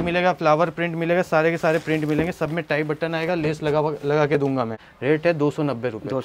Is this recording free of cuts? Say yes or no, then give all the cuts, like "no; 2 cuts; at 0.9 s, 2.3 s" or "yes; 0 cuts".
no; 1 cut; at 4.9 s